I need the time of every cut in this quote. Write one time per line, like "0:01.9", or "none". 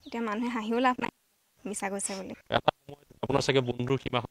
0:02.3